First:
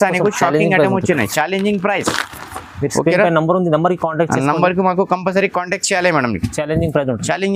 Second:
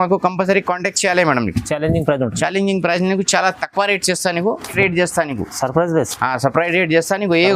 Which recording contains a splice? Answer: second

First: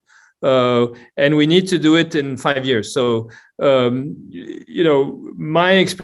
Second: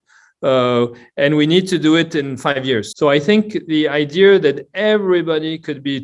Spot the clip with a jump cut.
second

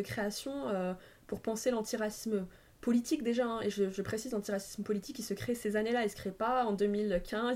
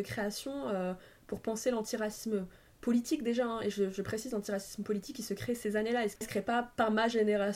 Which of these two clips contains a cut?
second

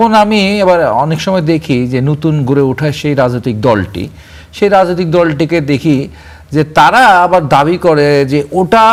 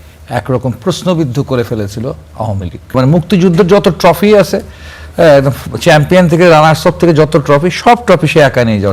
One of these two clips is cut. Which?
second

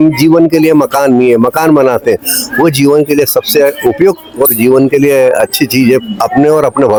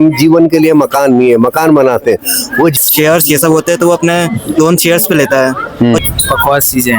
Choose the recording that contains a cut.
second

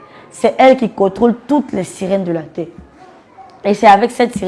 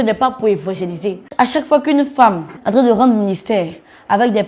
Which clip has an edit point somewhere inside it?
second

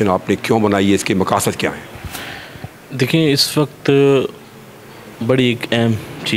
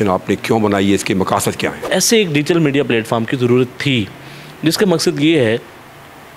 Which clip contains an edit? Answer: second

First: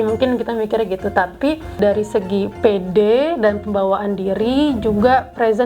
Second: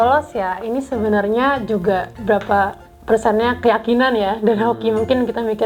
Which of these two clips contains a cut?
first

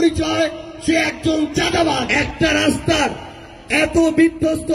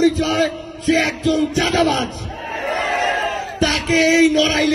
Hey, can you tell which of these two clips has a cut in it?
first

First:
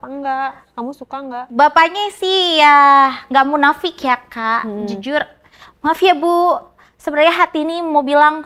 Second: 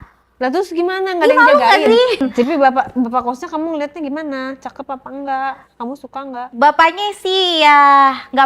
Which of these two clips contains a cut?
second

